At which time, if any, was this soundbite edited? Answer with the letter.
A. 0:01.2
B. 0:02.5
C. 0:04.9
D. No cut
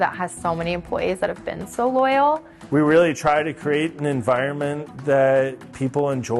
B